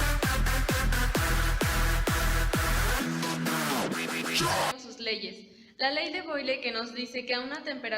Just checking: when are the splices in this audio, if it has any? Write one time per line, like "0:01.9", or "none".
0:02.1